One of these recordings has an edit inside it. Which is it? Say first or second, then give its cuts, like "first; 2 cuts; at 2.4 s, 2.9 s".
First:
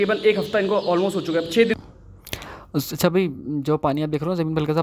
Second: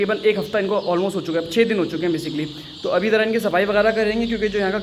first; 1 cut; at 1.8 s